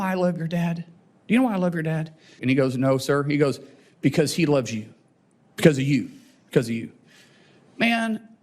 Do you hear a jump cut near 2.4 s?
yes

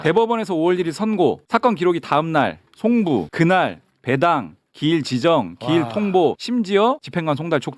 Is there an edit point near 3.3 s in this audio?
yes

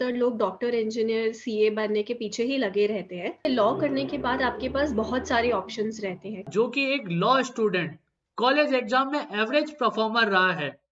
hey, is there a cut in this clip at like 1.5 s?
no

